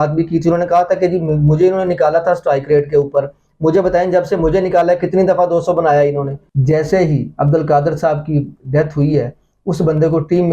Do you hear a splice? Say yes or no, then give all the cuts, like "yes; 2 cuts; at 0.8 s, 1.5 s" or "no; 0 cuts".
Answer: yes; 1 cut; at 6.4 s